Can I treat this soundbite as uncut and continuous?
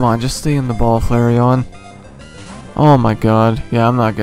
yes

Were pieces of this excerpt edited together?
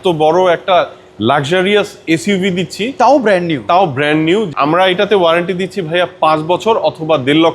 yes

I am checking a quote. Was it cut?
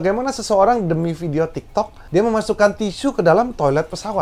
no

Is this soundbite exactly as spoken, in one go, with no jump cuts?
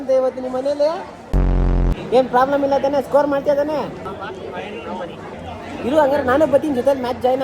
no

